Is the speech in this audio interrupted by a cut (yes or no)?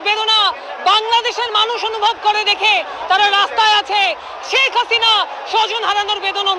no